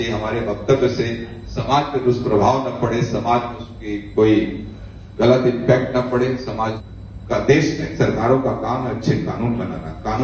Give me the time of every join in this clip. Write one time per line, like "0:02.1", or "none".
0:06.8